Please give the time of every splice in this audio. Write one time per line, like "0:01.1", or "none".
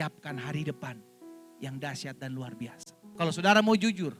0:03.0